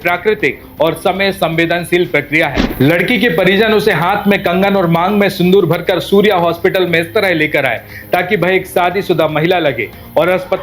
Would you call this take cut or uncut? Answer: cut